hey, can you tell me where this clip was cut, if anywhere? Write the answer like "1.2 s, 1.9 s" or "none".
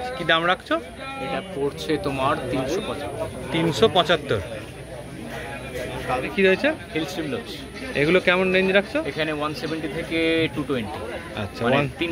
none